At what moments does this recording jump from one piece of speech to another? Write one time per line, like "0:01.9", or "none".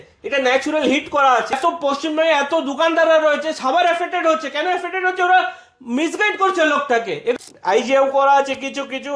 0:01.5
0:07.3

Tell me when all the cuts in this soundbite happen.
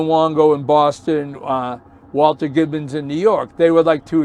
none

